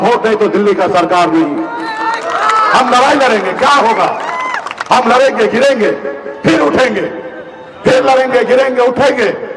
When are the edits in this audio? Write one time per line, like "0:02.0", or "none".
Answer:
none